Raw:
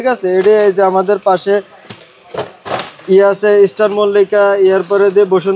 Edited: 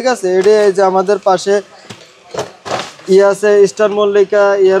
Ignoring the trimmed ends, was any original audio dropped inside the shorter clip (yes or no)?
no